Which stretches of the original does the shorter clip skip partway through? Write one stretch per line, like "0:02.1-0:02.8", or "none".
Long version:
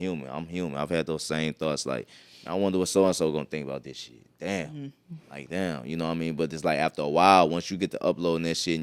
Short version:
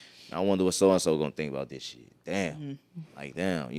none